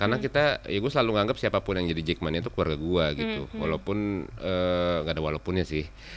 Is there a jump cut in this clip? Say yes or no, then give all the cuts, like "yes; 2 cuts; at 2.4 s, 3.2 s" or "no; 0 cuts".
no; 0 cuts